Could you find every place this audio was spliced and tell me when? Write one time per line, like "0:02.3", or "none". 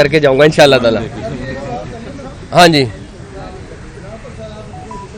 none